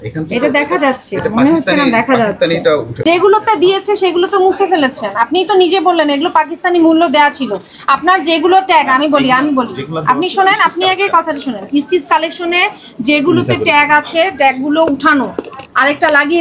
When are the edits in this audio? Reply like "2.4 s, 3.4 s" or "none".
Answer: 2.9 s